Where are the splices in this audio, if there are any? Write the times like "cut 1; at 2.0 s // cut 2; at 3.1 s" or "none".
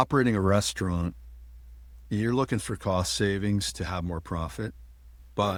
none